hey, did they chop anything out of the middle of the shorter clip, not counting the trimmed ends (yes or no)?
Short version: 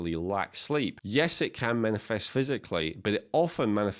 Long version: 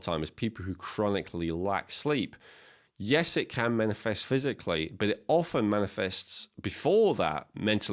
yes